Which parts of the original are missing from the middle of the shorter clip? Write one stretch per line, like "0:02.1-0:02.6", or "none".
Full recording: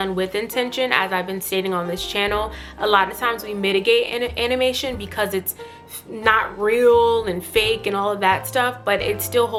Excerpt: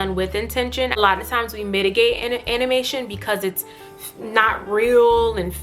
0:01.0-0:02.9